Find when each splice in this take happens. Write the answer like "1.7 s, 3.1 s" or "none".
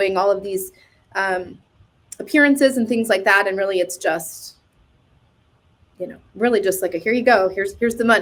none

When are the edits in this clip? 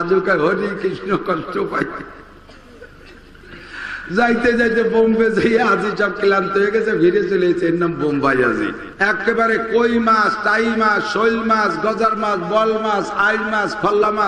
8.9 s

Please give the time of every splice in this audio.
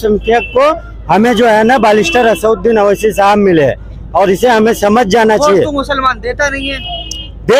none

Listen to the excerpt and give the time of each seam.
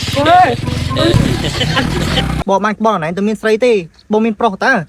2.4 s

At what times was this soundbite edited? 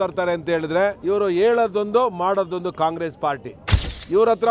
1.0 s

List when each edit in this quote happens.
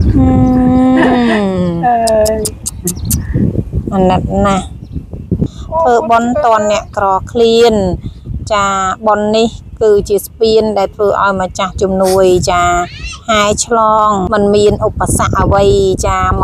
5.4 s, 14.2 s

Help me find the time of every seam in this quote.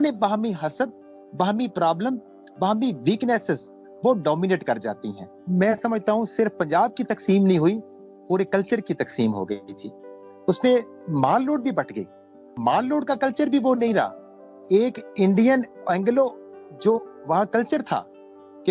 5.3 s

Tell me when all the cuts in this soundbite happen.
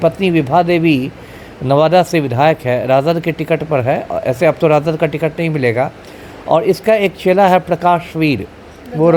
none

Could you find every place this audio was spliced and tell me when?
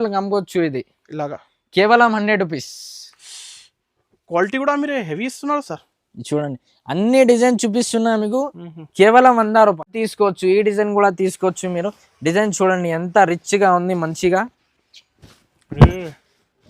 10.0 s

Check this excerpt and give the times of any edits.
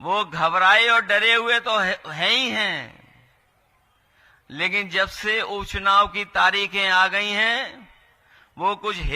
none

